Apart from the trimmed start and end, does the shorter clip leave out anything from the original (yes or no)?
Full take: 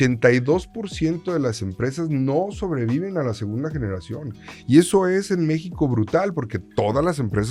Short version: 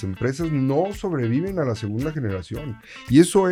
no